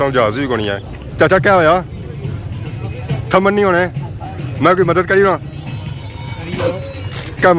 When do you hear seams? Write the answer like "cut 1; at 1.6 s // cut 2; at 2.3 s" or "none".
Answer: cut 1; at 1.0 s